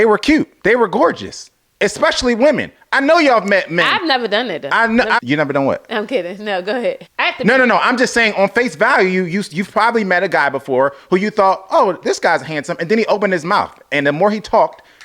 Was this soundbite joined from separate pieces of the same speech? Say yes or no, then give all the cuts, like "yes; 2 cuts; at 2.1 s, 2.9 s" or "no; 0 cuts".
yes; 2 cuts; at 5.2 s, 7.1 s